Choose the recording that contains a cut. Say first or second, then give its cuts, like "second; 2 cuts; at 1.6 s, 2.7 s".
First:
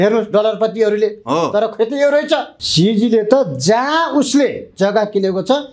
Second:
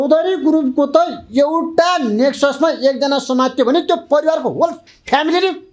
first; 1 cut; at 2.6 s